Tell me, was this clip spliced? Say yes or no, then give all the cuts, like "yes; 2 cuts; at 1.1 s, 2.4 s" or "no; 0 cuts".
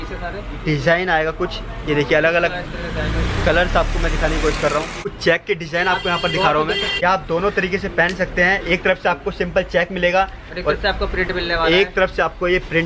yes; 2 cuts; at 5.2 s, 6.9 s